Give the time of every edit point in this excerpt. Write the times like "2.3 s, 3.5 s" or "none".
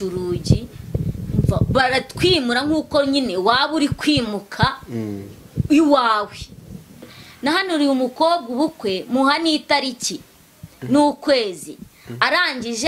7.1 s